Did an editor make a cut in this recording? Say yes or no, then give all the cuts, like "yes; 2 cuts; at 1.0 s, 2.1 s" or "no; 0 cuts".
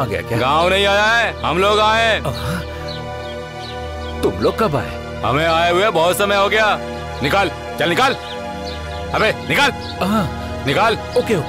no; 0 cuts